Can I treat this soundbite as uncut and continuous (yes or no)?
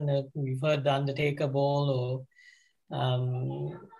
yes